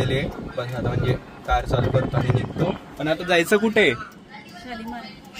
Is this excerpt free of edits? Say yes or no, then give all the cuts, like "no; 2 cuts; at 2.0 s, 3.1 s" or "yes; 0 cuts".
yes; 0 cuts